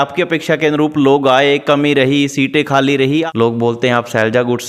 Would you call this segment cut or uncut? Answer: cut